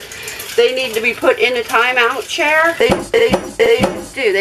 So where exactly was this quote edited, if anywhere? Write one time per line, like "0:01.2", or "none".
none